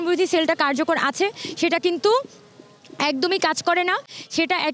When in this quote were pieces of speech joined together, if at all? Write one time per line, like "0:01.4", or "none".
none